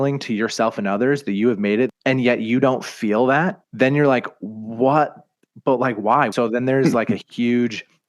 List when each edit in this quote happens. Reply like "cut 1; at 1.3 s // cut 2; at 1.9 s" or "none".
cut 1; at 1.9 s // cut 2; at 3.6 s // cut 3; at 6.3 s